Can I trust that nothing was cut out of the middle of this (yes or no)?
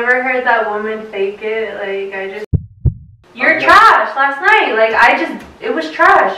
no